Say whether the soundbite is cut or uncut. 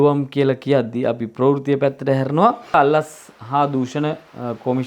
cut